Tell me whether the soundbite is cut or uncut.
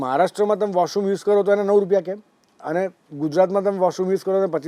uncut